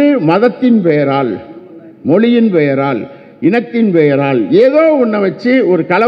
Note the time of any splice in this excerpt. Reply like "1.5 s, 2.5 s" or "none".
none